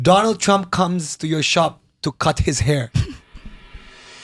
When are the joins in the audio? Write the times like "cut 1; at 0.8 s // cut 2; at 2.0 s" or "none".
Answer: none